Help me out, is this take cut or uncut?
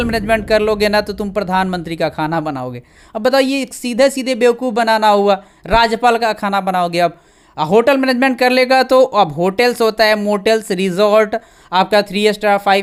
uncut